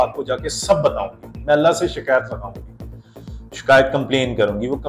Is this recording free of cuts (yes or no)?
yes